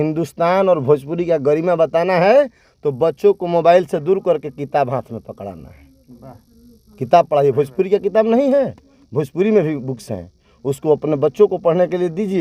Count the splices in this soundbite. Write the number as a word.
zero